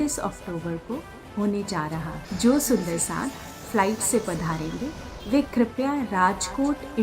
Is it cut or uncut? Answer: cut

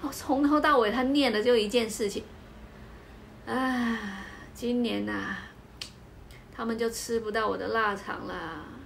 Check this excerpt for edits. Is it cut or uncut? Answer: uncut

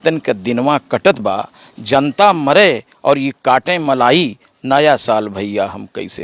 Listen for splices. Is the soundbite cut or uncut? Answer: uncut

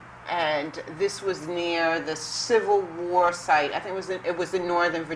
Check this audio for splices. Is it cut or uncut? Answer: cut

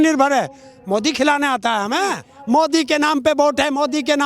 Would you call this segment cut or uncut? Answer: cut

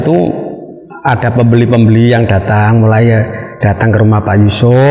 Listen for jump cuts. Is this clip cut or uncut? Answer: uncut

